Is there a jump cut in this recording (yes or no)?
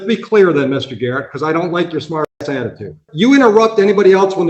yes